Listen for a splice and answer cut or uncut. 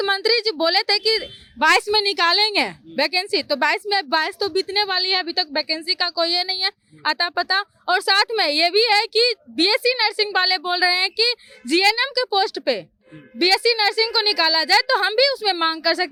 uncut